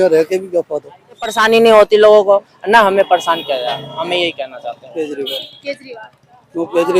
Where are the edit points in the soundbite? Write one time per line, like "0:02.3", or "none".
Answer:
0:01.4
0:04.8